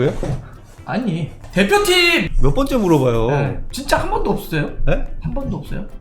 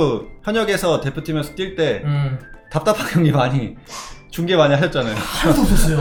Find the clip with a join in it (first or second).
first